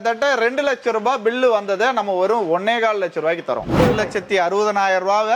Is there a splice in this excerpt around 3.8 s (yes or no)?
yes